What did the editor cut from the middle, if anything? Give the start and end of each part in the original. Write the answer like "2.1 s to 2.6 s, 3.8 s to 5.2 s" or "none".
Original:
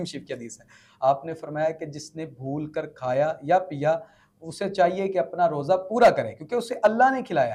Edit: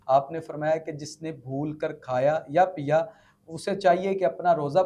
none